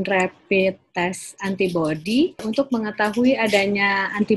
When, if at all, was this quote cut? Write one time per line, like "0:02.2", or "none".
0:02.4